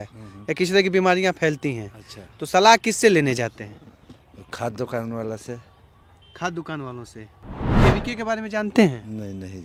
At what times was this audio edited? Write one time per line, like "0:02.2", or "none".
none